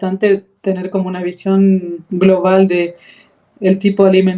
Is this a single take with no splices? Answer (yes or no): yes